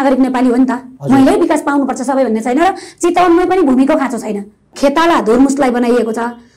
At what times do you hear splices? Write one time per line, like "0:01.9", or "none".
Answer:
0:04.7